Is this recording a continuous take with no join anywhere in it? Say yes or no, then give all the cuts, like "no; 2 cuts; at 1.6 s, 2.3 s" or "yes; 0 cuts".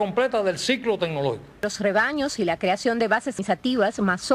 yes; 0 cuts